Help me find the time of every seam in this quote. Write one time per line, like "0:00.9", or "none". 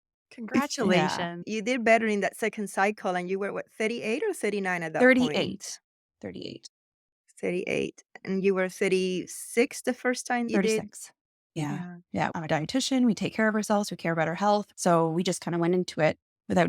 0:10.5
0:12.3
0:14.7